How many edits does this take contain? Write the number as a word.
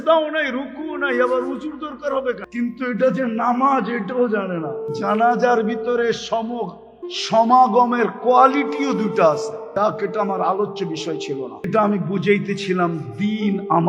four